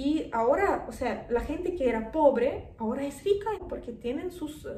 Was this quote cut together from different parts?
yes; 1 cut; at 3.6 s

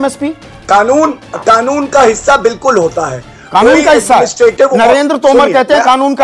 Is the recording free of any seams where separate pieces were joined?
yes; 0 cuts

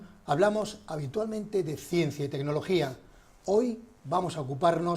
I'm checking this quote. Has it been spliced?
yes; 1 cut; at 4.0 s

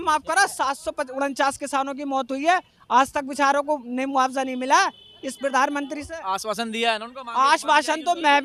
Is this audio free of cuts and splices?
yes; 0 cuts

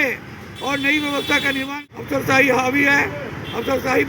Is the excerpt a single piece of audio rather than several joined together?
no; 1 cut; at 1.7 s

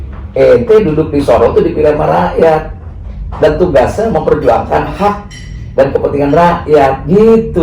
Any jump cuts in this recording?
no; 0 cuts

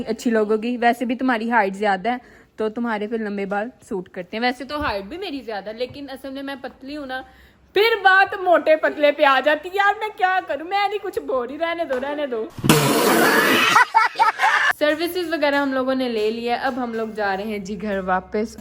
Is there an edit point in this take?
no; 0 cuts

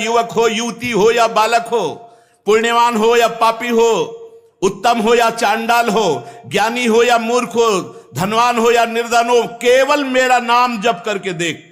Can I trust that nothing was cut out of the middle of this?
yes; 0 cuts

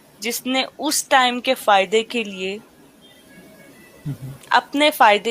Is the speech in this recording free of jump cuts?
yes; 0 cuts

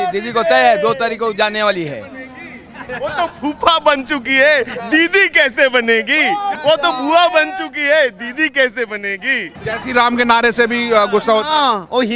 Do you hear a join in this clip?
yes; 2 cuts; at 6.6 s, 9.5 s

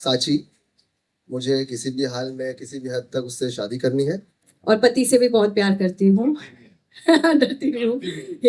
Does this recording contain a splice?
yes; 1 cut; at 4.5 s

